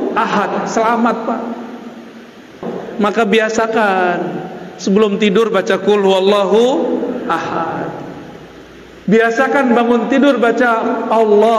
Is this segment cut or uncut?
cut